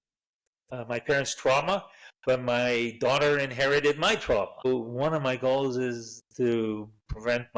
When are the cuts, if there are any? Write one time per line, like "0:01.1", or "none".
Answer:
0:04.7

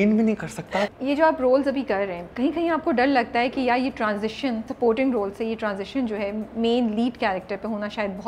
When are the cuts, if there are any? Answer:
0:00.9
0:02.2
0:04.7

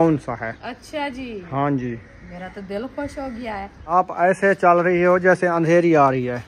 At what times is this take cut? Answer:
none

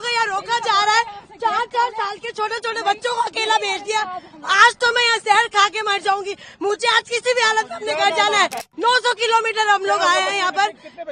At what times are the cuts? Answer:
0:08.7

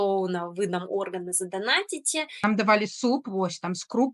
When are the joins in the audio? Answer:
0:02.4

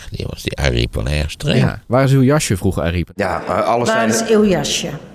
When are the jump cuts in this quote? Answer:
0:03.0

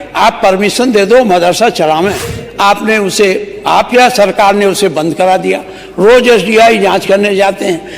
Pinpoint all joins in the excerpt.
0:02.3

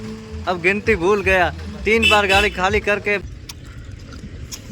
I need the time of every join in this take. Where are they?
0:03.2

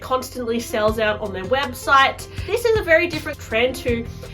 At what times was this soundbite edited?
0:02.4
0:03.4

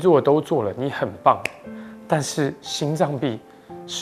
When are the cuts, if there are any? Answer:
none

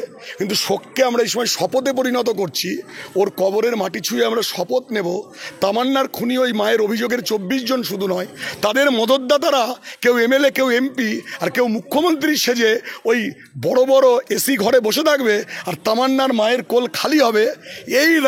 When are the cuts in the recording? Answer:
none

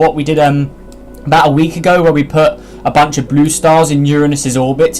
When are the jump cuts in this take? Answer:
none

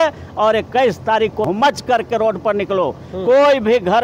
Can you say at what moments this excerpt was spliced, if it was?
0:01.4

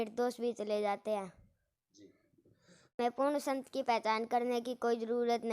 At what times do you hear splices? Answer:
0:02.9

